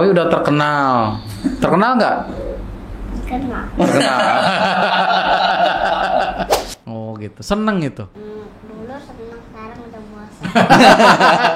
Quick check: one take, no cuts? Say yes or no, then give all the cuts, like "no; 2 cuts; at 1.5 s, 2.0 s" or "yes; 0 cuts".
no; 2 cuts; at 6.7 s, 8.1 s